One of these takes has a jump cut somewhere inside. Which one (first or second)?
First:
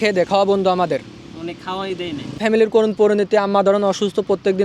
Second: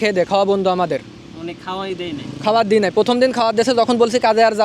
first